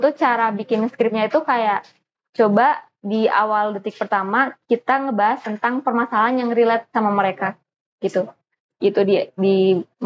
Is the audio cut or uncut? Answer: uncut